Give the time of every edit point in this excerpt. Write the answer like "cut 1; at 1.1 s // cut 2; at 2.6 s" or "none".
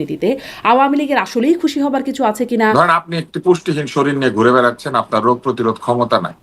cut 1; at 2.7 s

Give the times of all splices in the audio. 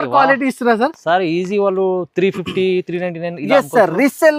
none

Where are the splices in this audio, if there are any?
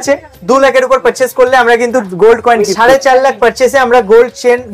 cut 1; at 2.7 s

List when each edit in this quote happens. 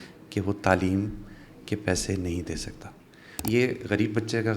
cut 1; at 3.4 s

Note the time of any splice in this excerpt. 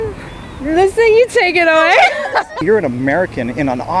cut 1; at 2.6 s

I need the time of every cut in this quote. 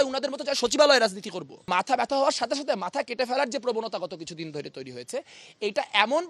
cut 1; at 1.7 s

